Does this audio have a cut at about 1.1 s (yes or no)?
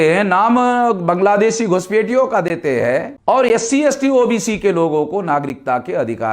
no